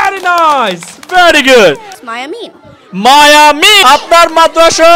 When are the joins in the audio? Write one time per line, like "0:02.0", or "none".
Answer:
0:01.9
0:03.8